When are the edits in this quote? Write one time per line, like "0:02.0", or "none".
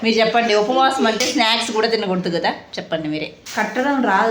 0:03.4

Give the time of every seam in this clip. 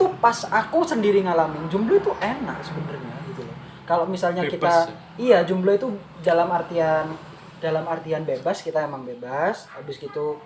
none

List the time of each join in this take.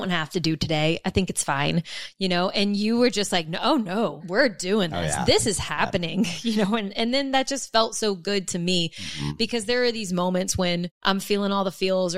0:04.2
0:10.9

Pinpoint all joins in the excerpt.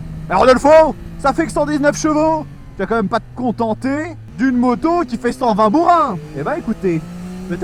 none

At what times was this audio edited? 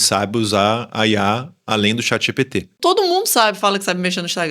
0:02.7

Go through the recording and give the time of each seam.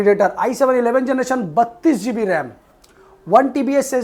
none

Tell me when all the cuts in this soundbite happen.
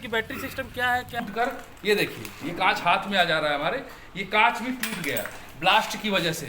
0:01.1

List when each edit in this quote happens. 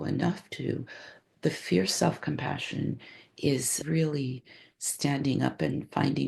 0:03.7

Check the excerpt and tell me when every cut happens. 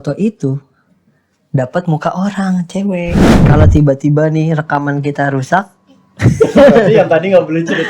0:03.3

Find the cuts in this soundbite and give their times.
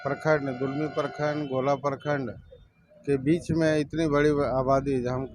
none

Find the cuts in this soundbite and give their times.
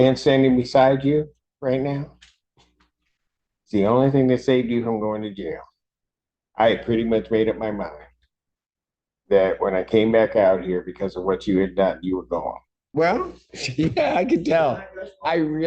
0:12.7

